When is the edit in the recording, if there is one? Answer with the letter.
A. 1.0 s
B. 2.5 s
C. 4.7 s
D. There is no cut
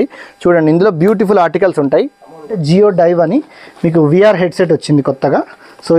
B